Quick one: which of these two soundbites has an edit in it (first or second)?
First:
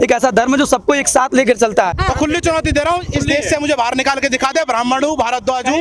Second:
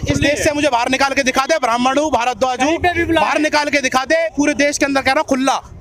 first